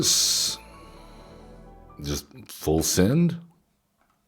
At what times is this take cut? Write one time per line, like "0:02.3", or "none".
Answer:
0:02.0